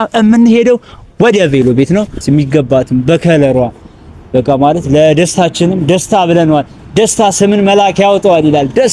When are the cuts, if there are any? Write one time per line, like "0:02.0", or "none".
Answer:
0:02.2